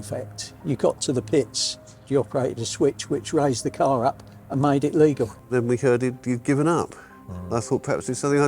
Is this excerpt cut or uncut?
cut